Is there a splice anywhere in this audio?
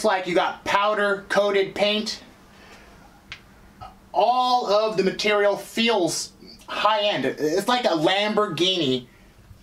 no; 0 cuts

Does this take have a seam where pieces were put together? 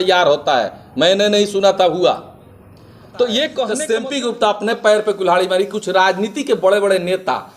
yes; 1 cut; at 3.8 s

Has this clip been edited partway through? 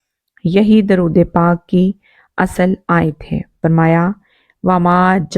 yes; 1 cut; at 3.6 s

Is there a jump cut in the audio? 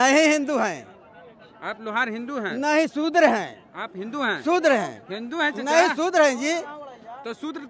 no; 0 cuts

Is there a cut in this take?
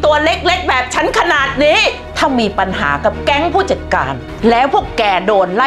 yes; 2 cuts; at 2.1 s, 4.2 s

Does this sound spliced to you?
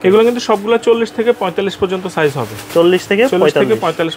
no; 0 cuts

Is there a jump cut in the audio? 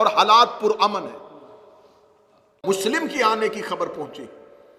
yes; 1 cut; at 2.6 s

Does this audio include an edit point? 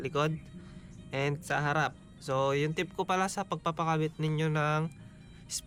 no; 0 cuts

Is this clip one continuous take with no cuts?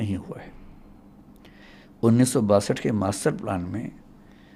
yes; 0 cuts

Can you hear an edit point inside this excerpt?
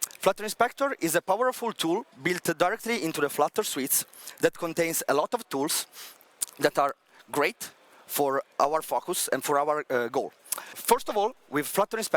yes; 2 cuts; at 8.5 s, 10.7 s

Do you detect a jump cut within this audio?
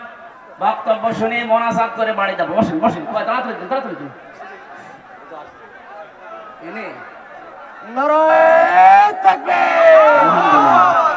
no; 0 cuts

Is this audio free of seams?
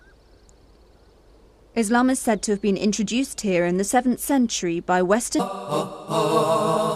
yes; 0 cuts

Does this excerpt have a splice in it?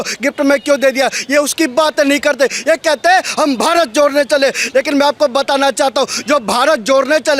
no; 0 cuts

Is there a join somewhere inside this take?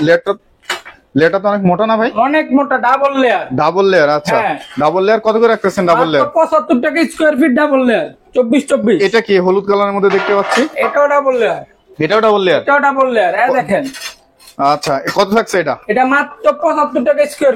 no; 0 cuts

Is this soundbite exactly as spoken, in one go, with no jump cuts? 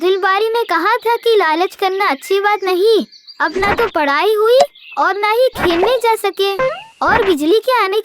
yes; 0 cuts

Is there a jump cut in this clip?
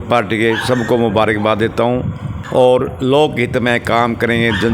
yes; 1 cut; at 2.3 s

